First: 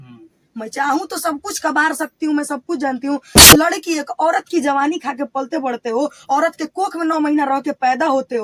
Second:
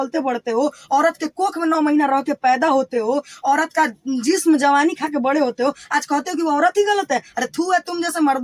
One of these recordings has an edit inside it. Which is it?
first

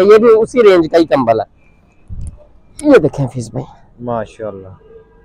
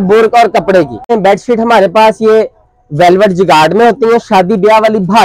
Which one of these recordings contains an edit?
second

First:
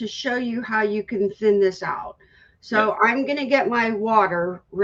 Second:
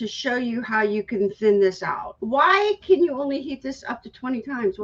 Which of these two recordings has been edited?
second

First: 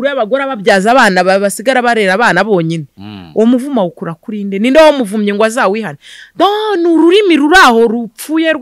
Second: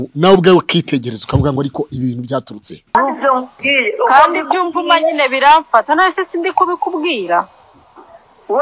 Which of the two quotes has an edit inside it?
second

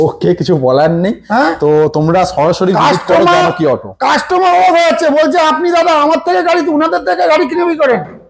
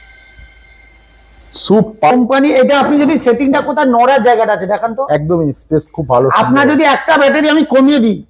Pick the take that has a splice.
second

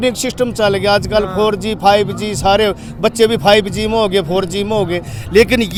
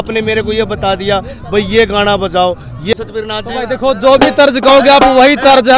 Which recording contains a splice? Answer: second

